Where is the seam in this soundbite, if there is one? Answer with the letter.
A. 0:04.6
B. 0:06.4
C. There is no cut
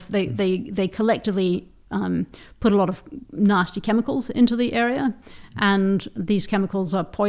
C